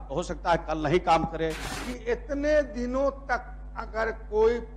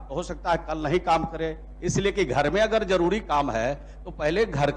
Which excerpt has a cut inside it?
first; 1 cut; at 1.7 s

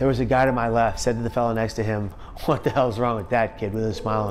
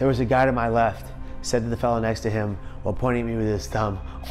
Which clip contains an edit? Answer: first; 2 cuts; at 1.0 s, 2.2 s

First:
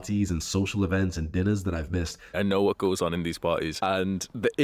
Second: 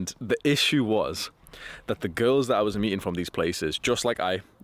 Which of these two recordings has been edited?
first; 1 cut; at 2.3 s

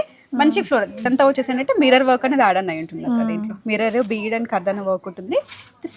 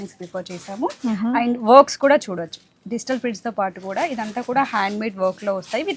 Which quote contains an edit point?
first; 1 cut; at 1.1 s

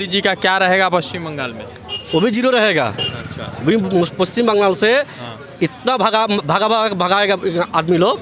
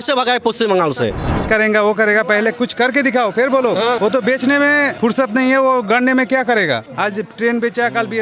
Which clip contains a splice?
second; 4 cuts; at 1.5 s, 4.0 s, 4.9 s, 6.9 s

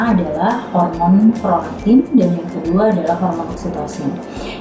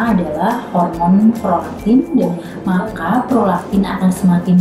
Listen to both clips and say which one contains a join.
second; 1 cut; at 2.5 s

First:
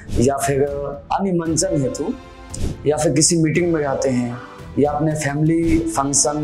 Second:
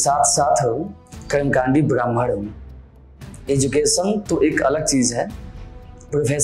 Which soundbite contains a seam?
first; 1 cut; at 1.0 s

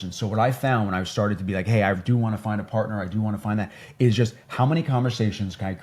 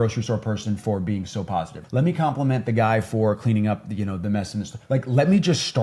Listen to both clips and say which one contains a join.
second; 2 cuts; at 1.8 s, 4.7 s

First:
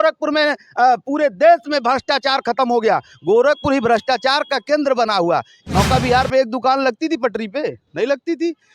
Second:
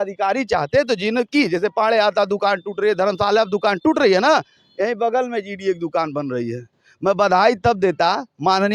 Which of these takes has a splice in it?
first; 1 cut; at 5.5 s

